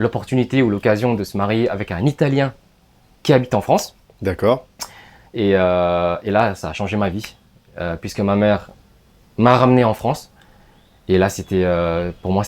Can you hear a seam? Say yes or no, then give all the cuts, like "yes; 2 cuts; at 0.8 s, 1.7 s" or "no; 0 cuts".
no; 0 cuts